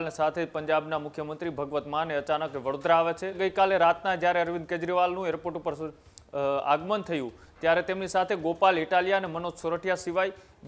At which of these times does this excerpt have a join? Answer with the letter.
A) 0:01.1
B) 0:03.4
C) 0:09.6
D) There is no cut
B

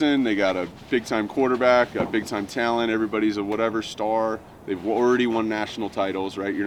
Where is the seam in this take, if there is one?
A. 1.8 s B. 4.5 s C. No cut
C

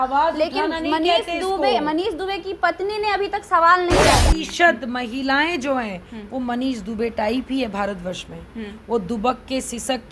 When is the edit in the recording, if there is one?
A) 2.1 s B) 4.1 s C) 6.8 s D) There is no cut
B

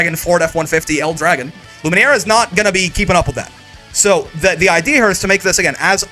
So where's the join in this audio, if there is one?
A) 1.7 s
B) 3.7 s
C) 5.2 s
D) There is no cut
A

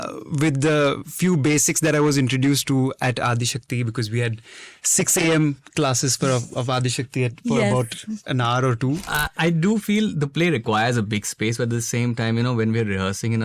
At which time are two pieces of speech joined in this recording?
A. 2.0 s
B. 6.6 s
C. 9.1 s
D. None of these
C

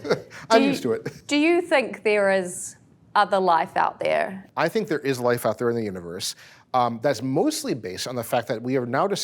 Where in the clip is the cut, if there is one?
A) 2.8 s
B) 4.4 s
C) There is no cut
B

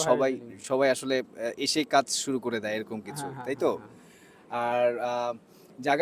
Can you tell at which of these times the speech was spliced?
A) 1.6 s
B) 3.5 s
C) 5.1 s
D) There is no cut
D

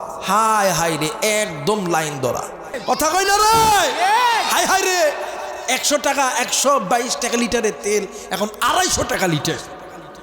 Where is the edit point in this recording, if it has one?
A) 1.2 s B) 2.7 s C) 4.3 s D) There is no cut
B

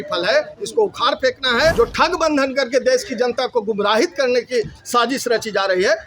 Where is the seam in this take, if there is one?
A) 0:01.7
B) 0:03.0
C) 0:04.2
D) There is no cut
A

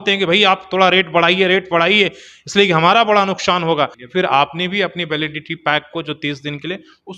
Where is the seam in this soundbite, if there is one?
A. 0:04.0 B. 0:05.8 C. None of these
A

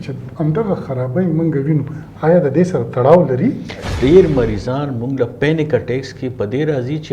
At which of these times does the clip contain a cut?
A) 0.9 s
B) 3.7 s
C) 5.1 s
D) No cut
B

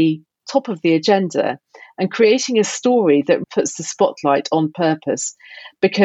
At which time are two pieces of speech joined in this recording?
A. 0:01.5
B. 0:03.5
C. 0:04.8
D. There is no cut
B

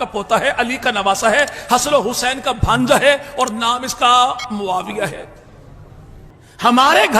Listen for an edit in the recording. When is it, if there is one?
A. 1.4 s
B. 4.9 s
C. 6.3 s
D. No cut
C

